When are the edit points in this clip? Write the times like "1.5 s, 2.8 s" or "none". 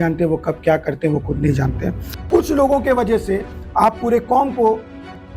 2.1 s